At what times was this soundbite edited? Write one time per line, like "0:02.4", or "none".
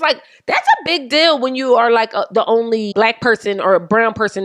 0:02.9